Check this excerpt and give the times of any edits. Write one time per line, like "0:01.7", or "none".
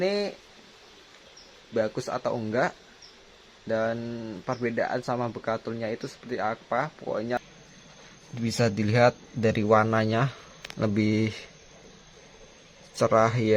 0:07.4